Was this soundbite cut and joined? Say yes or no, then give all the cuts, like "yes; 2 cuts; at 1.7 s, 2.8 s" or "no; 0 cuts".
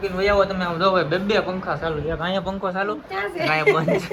no; 0 cuts